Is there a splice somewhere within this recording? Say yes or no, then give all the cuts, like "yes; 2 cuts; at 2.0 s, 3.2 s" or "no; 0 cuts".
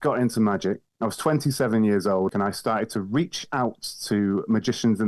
yes; 2 cuts; at 0.9 s, 2.3 s